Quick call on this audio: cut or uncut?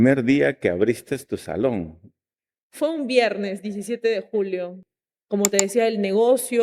cut